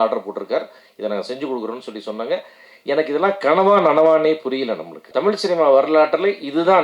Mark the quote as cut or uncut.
cut